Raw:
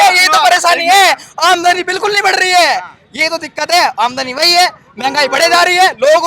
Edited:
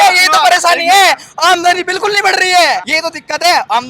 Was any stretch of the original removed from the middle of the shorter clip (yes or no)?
yes